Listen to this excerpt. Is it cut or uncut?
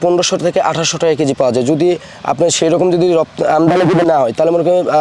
uncut